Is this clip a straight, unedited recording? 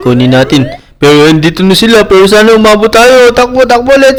yes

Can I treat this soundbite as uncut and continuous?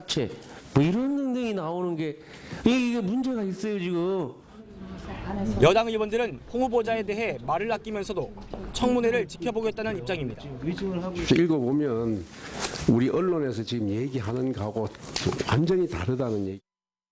no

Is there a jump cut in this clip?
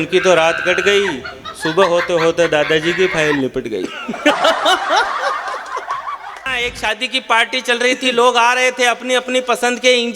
yes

